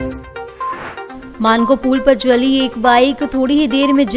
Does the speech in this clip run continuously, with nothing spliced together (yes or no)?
no